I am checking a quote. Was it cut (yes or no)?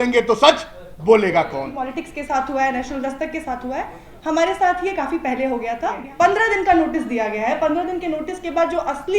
yes